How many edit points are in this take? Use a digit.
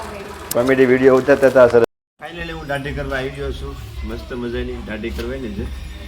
1